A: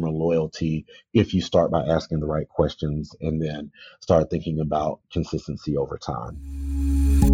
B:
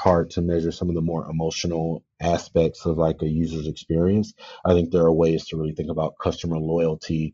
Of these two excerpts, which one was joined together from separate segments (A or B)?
A